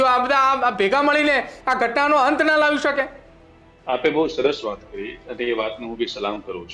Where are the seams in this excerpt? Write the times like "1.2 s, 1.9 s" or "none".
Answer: none